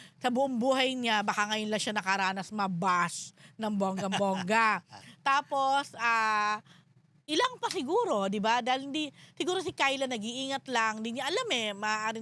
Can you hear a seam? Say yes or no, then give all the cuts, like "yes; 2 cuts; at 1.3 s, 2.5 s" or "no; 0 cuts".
no; 0 cuts